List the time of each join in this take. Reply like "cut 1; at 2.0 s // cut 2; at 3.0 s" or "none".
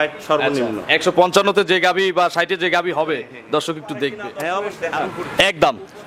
cut 1; at 4.7 s